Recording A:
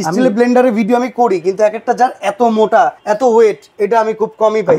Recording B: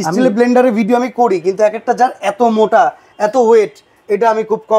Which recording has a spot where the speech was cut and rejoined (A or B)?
A